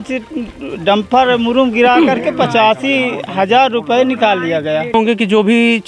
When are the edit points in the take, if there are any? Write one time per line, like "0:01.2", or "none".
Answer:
0:04.9